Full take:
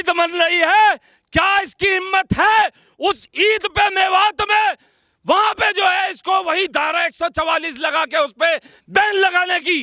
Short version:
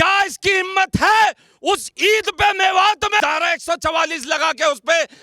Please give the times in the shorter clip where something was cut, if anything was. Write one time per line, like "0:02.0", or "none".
0:03.2